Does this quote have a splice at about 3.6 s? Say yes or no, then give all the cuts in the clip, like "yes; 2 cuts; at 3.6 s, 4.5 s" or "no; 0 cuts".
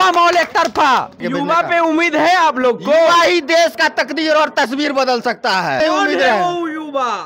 no; 2 cuts; at 1.2 s, 5.8 s